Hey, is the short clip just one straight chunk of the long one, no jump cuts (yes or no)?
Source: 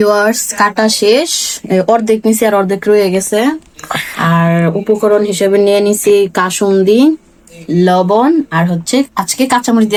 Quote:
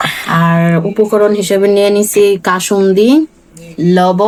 yes